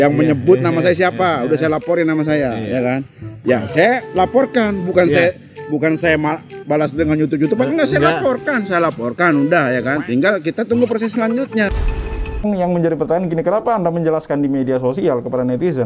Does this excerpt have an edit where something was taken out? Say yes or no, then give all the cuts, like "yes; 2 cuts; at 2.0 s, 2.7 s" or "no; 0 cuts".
yes; 1 cut; at 12.4 s